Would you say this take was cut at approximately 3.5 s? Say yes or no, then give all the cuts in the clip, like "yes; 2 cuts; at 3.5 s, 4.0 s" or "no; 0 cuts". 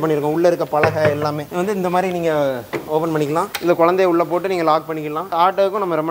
yes; 3 cuts; at 1.5 s, 3.5 s, 5.3 s